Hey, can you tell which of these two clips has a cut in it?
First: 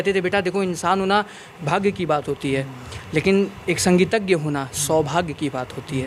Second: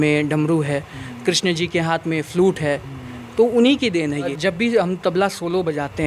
second; 1 cut; at 4.3 s

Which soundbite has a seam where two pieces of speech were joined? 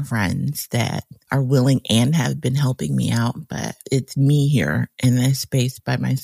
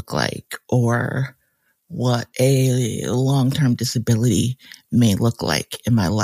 first; 1 cut; at 3.8 s

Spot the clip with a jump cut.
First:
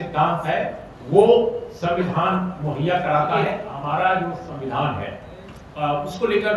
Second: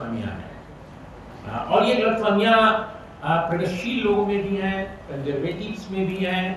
first; 1 cut; at 3.7 s

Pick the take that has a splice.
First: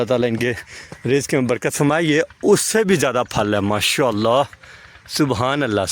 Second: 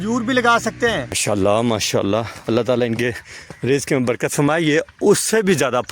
second; 1 cut; at 1.2 s

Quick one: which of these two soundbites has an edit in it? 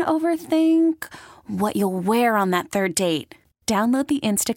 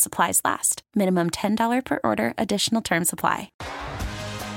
second; 1 cut; at 3.6 s

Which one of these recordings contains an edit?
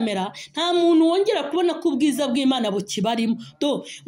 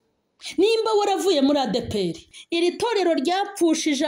second; 1 cut; at 2.2 s

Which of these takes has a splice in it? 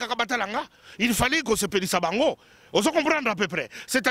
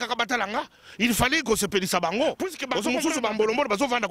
second; 1 cut; at 2.7 s

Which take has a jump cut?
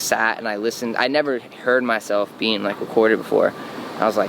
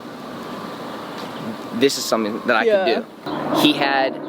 second; 1 cut; at 3.2 s

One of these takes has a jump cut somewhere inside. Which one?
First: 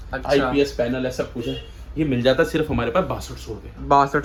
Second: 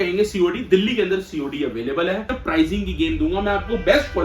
second; 1 cut; at 2.3 s

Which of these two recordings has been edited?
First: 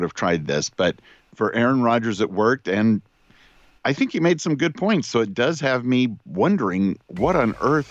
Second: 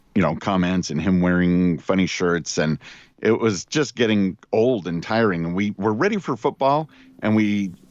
second; 1 cut; at 5.7 s

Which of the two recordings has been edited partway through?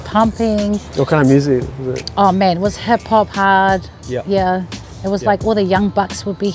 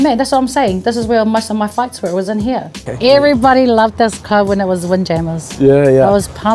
second; 1 cut; at 2.9 s

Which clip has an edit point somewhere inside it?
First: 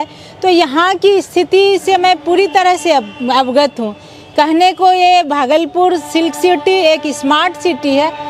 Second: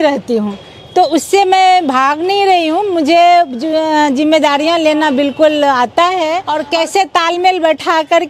second; 1 cut; at 6.5 s

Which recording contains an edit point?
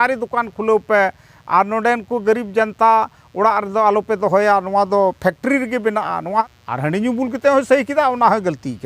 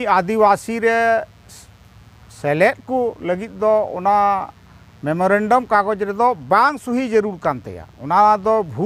first; 1 cut; at 6.4 s

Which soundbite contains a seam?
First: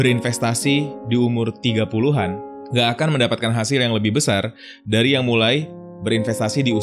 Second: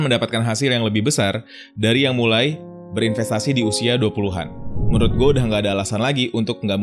second; 1 cut; at 4.8 s

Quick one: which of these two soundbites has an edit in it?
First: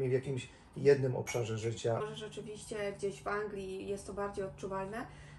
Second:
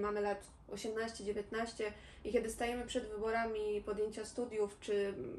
first; 1 cut; at 2.0 s

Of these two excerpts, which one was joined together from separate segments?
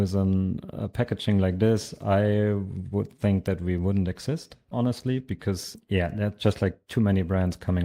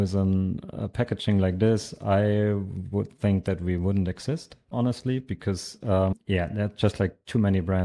first; 1 cut; at 5.8 s

